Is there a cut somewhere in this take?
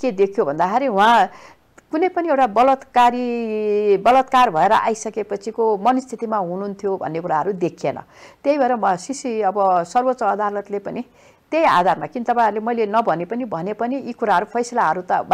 no; 0 cuts

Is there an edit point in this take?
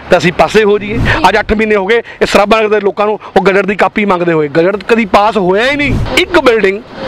yes; 2 cuts; at 1.0 s, 6.0 s

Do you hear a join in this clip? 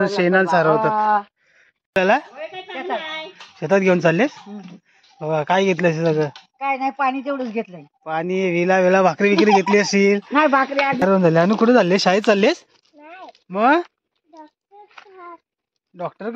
yes; 2 cuts; at 2.0 s, 11.0 s

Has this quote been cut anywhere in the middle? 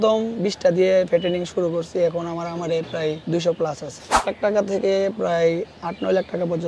yes; 2 cuts; at 3.2 s, 4.2 s

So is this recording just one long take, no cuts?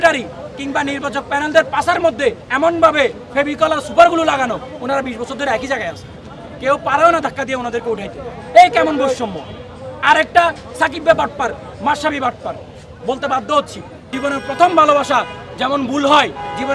no; 1 cut; at 14.1 s

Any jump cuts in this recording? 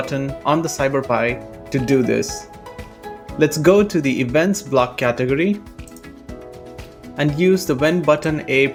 no; 0 cuts

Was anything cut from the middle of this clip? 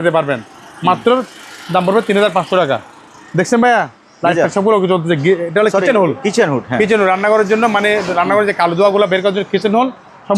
no; 0 cuts

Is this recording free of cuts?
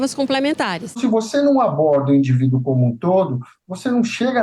no; 1 cut; at 1.0 s

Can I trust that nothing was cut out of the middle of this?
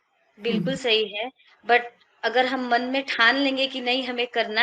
yes; 0 cuts

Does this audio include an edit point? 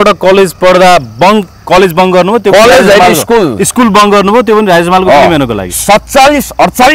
no; 0 cuts

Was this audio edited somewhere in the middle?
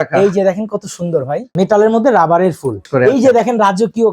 yes; 2 cuts; at 1.4 s, 2.9 s

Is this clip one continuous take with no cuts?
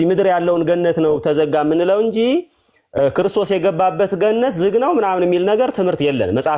yes; 0 cuts

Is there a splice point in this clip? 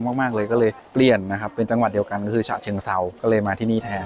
yes; 2 cuts; at 0.8 s, 3.1 s

